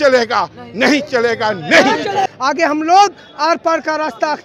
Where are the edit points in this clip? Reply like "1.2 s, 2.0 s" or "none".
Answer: 2.3 s